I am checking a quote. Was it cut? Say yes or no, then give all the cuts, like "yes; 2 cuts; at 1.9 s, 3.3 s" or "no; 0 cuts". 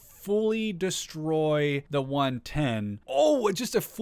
yes; 2 cuts; at 1.8 s, 3.0 s